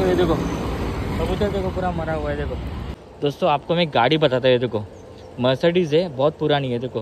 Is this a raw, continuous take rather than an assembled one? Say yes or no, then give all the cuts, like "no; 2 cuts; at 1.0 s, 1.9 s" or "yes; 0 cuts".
no; 1 cut; at 3.0 s